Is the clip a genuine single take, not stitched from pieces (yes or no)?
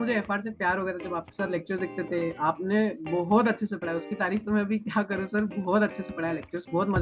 yes